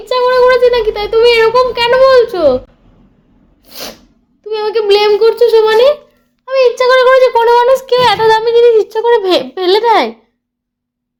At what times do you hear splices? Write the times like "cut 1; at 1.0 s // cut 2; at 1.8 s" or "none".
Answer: none